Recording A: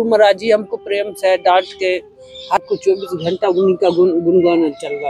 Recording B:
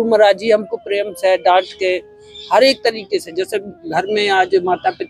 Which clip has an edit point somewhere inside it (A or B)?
A